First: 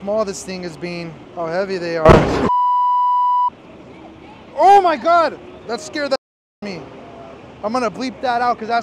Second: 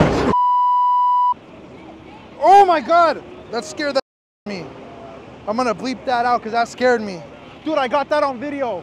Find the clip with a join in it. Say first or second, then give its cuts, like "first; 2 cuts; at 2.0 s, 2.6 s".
first; 1 cut; at 1.2 s